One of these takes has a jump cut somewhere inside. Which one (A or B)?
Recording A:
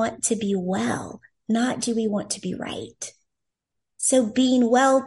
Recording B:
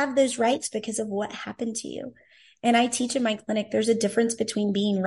A